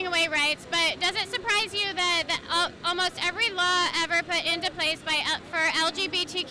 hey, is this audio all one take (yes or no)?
yes